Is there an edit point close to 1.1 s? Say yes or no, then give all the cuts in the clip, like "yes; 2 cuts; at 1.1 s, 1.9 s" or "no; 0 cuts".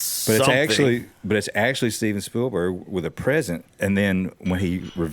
no; 1 cut; at 3.6 s